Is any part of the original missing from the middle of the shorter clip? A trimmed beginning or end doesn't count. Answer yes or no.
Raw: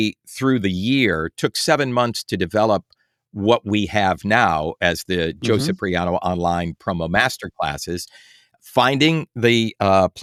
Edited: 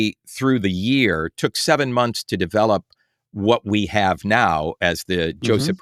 no